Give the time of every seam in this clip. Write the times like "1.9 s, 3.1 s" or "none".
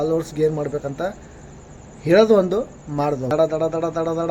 3.3 s

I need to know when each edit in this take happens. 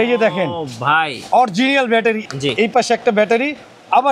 2.2 s

